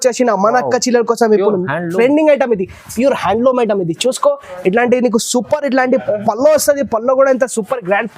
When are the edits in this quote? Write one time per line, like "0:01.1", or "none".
none